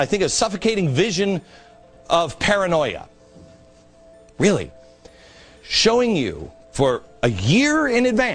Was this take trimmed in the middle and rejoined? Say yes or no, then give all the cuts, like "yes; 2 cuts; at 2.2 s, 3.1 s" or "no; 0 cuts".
no; 0 cuts